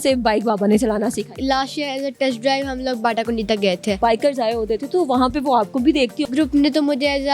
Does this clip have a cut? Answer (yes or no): yes